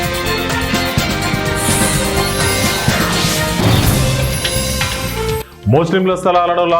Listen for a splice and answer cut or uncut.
cut